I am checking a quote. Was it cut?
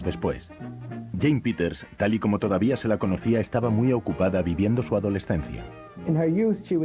no; 0 cuts

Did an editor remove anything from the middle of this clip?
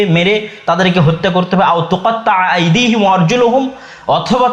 no; 0 cuts

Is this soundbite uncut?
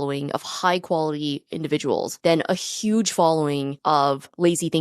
no; 2 cuts; at 2.1 s, 4.0 s

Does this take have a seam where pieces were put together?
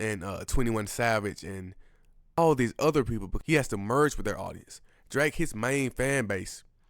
yes; 2 cuts; at 2.4 s, 3.3 s

